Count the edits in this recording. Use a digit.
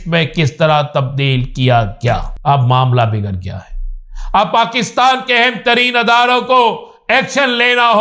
1